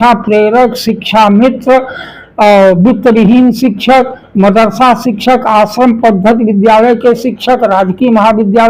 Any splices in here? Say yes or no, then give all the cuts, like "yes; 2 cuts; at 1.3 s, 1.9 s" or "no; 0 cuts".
no; 0 cuts